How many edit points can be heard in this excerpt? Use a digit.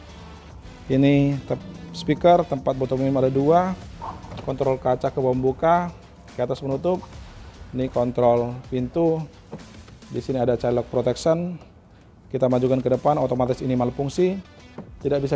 0